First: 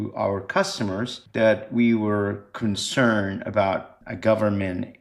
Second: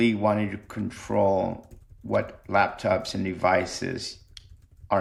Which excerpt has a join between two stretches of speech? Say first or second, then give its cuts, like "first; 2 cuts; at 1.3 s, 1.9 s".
first; 2 cuts; at 1.2 s, 4.0 s